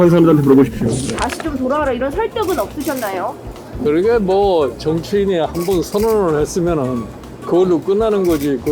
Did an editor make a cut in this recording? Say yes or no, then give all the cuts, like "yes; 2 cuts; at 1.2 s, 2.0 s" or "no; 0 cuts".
yes; 1 cut; at 1.1 s